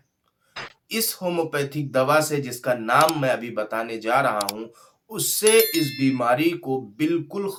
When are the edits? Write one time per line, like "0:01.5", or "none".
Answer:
none